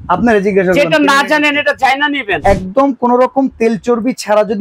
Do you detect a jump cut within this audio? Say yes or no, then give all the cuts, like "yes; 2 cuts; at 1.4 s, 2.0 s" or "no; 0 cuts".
yes; 1 cut; at 2.4 s